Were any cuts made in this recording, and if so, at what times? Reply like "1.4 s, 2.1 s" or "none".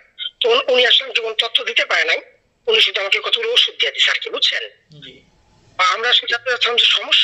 none